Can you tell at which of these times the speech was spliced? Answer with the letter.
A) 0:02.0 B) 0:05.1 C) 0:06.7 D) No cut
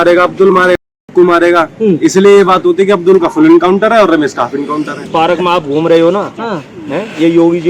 B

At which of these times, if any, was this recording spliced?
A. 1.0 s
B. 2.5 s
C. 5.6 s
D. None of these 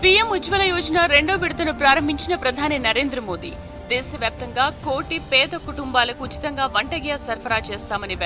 D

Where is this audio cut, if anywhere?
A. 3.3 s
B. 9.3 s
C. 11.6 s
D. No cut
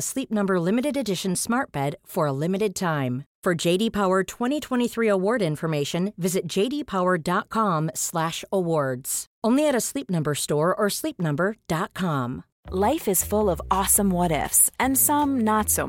D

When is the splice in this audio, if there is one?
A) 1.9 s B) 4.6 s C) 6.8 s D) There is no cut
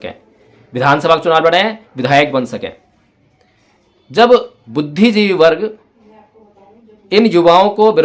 B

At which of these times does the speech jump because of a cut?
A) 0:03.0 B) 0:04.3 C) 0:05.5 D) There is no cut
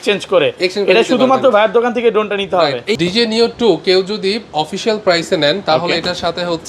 A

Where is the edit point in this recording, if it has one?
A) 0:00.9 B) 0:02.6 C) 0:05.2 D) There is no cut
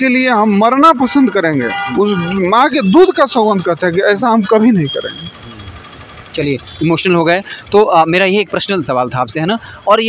D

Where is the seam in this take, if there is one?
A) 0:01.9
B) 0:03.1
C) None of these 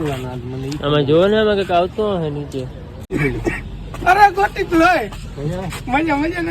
B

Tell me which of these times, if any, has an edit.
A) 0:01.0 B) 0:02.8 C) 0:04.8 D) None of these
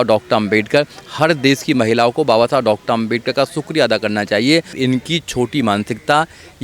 C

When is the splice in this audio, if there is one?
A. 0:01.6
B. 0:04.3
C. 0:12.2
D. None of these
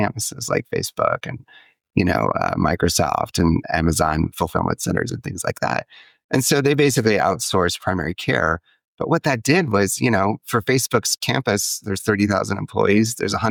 D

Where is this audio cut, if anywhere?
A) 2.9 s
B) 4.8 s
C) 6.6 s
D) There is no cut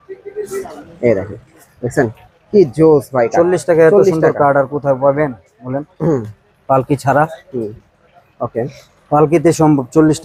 D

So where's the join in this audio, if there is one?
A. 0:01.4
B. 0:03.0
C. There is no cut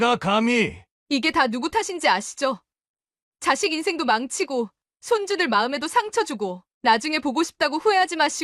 C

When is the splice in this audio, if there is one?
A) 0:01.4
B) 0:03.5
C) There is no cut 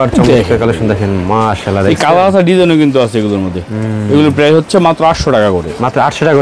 C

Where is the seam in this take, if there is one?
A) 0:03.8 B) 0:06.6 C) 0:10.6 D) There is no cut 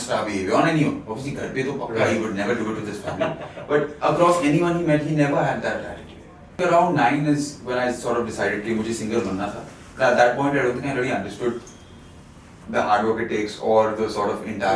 B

